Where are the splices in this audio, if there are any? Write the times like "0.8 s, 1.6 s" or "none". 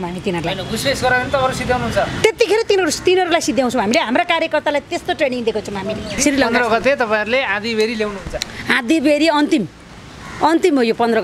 6.2 s